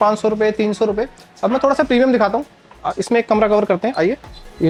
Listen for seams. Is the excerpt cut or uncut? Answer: uncut